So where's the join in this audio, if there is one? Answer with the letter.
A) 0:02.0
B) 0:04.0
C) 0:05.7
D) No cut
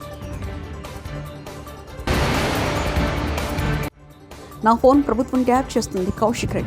A